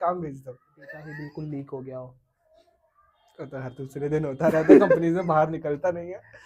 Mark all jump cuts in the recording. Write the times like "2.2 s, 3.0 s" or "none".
1.1 s